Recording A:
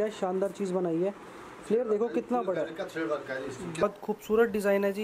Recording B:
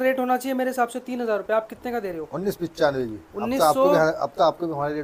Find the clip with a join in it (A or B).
A